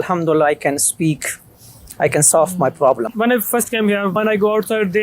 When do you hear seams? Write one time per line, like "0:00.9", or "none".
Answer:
0:03.1